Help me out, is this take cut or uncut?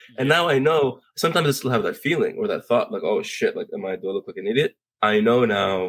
cut